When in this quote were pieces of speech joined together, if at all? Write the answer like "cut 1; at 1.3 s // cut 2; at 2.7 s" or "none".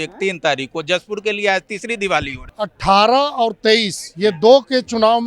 cut 1; at 2.4 s